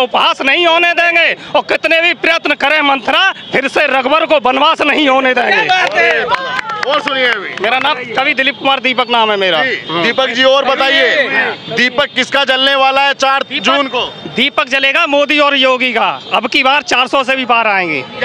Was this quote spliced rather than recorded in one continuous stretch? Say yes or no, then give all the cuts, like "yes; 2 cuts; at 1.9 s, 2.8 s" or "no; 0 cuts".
no; 0 cuts